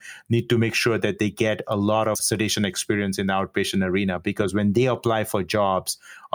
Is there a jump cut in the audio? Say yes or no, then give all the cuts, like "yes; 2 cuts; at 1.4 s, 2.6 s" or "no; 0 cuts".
yes; 1 cut; at 2.2 s